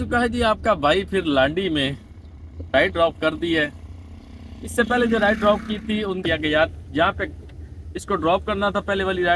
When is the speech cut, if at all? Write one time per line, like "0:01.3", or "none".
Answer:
0:06.2